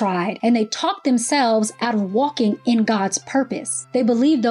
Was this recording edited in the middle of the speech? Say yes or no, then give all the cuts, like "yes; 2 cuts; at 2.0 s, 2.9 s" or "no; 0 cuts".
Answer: no; 0 cuts